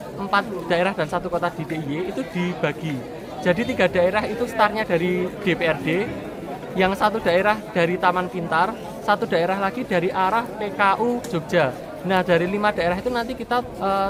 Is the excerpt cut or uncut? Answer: uncut